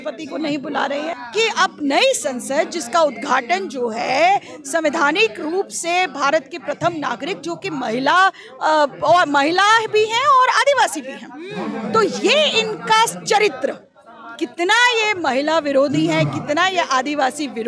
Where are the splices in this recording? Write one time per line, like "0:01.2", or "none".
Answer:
0:01.2

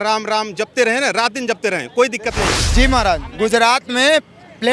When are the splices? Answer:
0:02.6

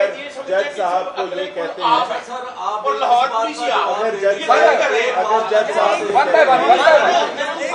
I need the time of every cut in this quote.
none

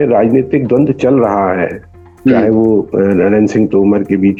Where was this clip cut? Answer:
none

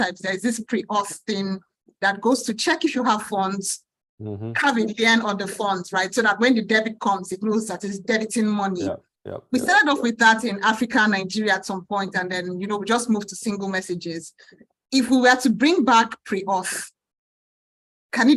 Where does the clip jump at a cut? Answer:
none

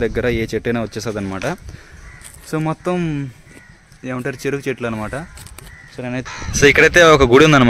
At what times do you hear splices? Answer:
0:06.1

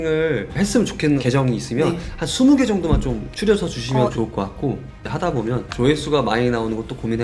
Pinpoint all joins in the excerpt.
0:04.9

